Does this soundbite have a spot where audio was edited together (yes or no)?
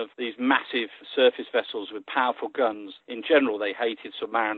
yes